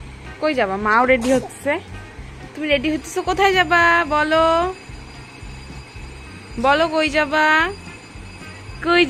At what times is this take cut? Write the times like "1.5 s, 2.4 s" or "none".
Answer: none